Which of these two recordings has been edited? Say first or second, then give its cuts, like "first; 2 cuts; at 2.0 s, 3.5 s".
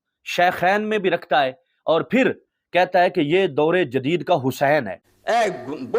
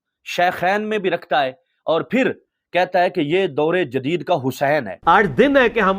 first; 1 cut; at 5.0 s